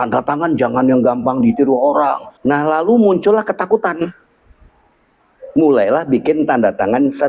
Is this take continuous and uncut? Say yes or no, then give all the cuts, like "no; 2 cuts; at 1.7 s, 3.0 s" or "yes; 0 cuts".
no; 1 cut; at 2.3 s